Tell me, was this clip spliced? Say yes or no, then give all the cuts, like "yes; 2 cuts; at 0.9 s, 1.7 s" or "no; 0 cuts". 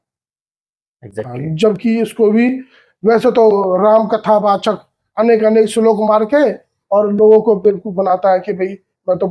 no; 0 cuts